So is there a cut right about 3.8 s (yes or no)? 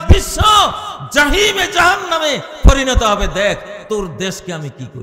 no